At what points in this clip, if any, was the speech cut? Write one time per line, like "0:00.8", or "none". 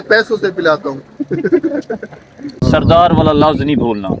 0:02.5